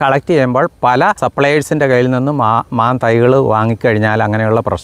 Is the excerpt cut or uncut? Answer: cut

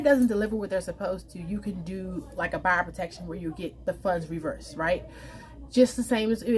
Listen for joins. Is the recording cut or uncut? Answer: uncut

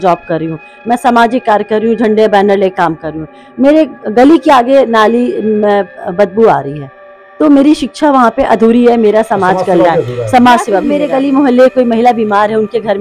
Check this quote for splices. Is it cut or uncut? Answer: cut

